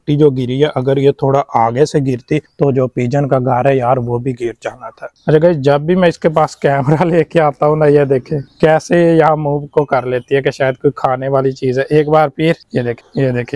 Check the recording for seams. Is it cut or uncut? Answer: cut